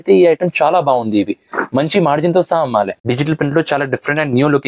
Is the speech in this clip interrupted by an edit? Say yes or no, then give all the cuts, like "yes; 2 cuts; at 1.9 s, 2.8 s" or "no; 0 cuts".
yes; 1 cut; at 3.0 s